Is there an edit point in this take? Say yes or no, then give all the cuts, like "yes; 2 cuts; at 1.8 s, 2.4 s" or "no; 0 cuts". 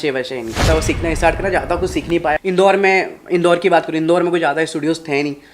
yes; 1 cut; at 2.4 s